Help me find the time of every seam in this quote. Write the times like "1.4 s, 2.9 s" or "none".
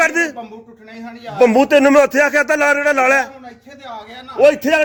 none